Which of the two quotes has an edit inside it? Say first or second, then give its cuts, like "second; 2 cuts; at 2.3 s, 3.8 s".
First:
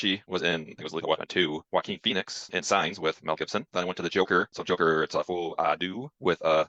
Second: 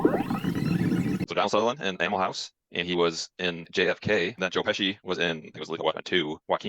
second; 1 cut; at 1.2 s